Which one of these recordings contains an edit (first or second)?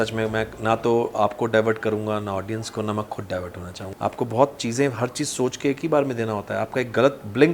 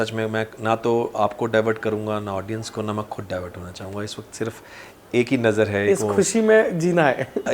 first